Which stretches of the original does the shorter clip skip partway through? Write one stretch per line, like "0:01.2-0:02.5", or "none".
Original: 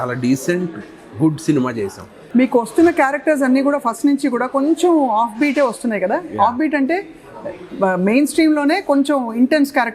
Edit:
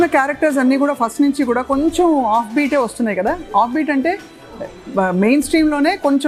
none